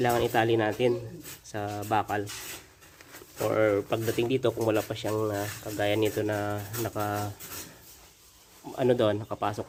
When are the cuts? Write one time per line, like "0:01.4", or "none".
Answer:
none